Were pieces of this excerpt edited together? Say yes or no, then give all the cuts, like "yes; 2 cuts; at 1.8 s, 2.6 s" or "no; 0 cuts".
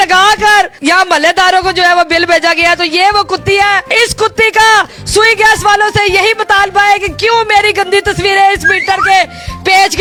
no; 0 cuts